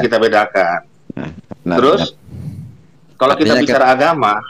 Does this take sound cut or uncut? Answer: uncut